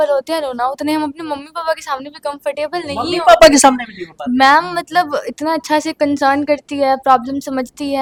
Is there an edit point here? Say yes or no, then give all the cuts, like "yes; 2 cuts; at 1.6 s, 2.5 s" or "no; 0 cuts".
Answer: no; 0 cuts